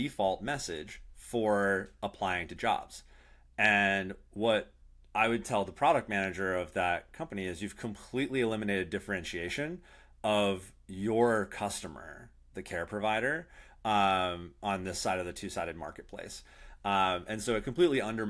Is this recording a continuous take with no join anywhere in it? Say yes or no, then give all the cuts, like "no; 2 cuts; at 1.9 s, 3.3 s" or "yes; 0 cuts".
yes; 0 cuts